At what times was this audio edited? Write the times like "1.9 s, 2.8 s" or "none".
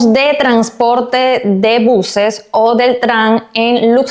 none